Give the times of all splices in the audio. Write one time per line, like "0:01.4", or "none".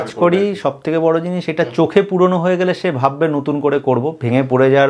none